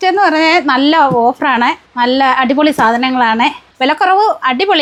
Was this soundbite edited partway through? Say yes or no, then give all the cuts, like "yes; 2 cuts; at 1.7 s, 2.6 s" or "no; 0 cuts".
no; 0 cuts